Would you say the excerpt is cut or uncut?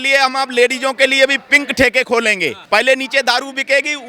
cut